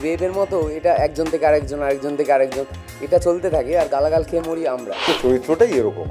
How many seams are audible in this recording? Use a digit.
1